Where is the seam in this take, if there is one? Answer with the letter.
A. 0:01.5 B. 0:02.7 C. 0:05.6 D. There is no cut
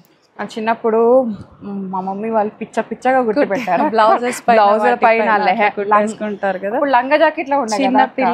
D